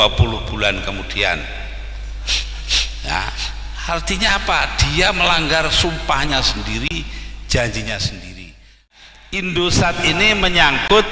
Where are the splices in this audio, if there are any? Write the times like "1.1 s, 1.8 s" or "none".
8.9 s